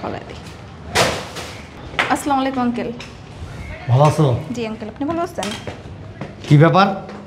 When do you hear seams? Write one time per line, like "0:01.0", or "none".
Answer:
0:01.8